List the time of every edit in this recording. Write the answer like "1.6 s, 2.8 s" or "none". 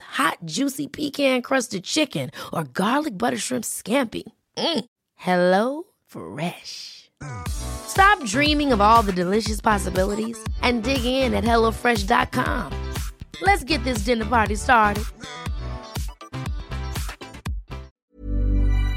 17.9 s